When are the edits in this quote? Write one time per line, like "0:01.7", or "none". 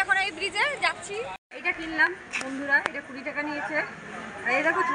0:01.4